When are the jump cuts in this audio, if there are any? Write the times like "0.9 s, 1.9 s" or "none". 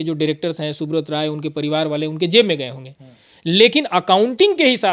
none